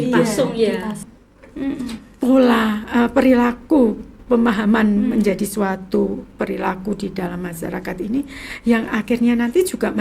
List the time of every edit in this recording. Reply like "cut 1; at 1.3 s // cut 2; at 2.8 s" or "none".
cut 1; at 1.0 s